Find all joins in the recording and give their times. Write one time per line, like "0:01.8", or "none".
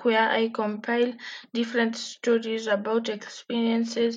none